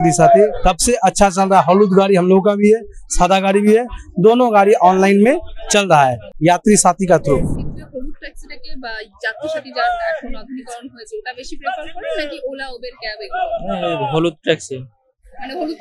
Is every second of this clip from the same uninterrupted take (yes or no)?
yes